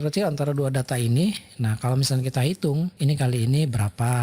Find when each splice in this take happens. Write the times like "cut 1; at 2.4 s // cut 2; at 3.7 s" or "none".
cut 1; at 2.9 s

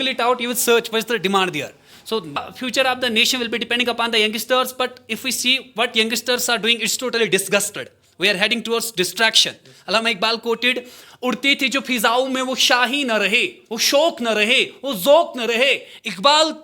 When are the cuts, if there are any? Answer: cut 1; at 2.4 s

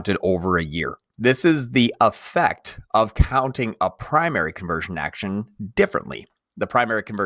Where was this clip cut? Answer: cut 1; at 1.0 s

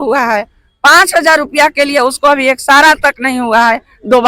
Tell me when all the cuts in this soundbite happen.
none

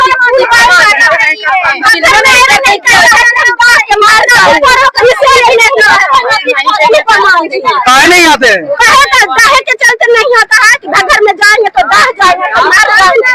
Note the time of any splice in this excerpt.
none

